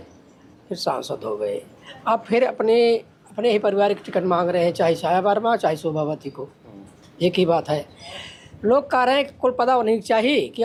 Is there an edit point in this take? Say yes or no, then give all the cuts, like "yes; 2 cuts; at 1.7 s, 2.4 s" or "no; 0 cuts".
no; 0 cuts